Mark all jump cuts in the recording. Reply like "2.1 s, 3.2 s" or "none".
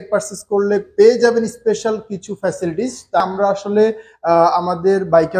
3.2 s